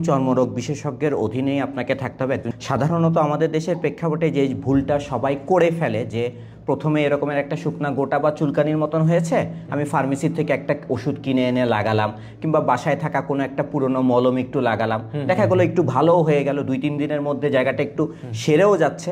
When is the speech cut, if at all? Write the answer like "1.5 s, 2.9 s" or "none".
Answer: 2.5 s